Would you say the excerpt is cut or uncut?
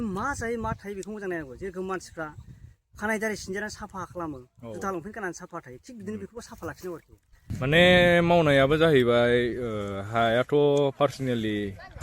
cut